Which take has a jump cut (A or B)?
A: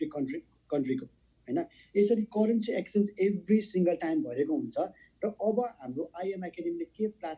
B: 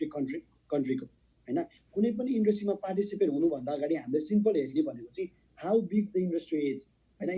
B